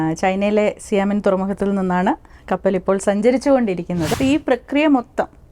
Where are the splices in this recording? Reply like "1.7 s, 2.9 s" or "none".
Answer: 4.1 s